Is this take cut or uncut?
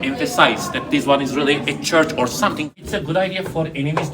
cut